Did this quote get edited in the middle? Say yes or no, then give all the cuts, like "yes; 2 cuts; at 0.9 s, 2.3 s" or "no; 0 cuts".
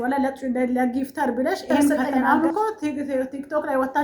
yes; 1 cut; at 2.1 s